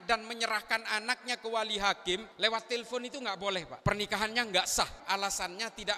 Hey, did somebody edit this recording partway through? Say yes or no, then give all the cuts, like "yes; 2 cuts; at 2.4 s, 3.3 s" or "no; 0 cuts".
yes; 3 cuts; at 2.3 s, 3.7 s, 5.0 s